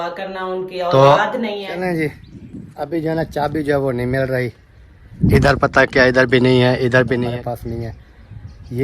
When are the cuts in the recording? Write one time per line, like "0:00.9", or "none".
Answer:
0:01.7
0:07.3